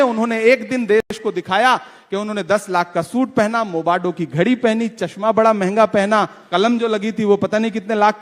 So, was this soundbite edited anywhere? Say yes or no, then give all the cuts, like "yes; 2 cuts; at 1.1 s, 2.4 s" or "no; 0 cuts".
yes; 1 cut; at 6.4 s